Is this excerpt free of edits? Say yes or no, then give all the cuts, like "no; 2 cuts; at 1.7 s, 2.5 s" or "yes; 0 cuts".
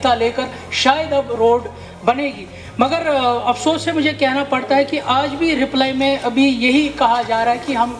yes; 0 cuts